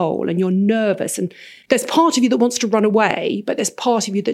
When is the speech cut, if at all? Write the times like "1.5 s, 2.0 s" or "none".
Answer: 1.5 s